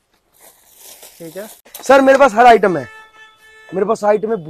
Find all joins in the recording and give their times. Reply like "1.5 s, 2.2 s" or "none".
1.7 s

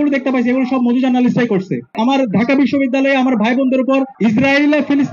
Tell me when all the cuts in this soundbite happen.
1.9 s, 4.1 s

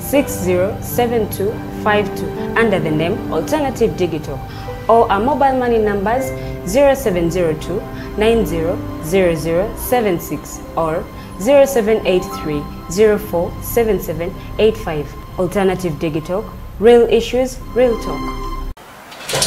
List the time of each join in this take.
18.6 s

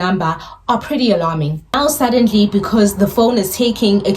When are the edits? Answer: 1.8 s

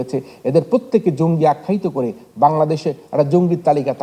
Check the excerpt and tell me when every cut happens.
none

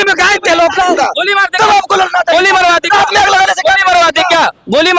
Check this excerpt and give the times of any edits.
1.0 s

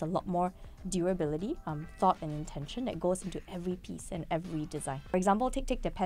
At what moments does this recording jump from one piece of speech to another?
5.1 s

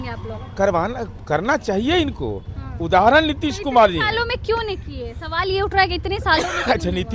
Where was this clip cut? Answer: none

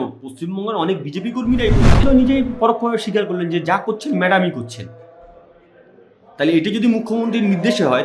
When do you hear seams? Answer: 2.0 s

